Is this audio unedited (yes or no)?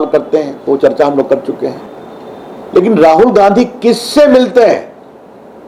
yes